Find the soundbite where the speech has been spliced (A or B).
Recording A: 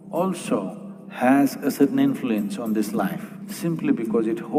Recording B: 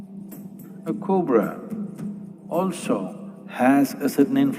B